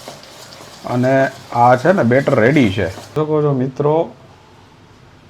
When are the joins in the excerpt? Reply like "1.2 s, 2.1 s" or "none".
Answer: 3.1 s